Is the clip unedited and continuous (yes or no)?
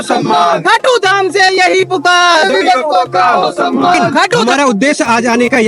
no